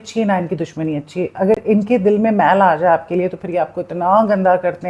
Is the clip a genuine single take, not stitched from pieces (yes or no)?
yes